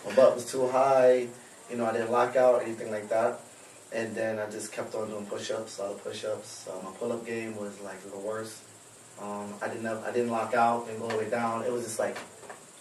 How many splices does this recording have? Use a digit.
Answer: 1